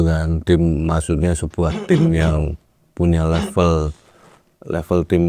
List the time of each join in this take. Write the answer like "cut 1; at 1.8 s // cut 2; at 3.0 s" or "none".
none